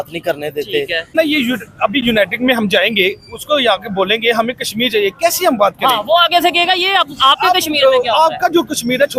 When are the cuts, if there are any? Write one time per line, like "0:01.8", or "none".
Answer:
0:01.3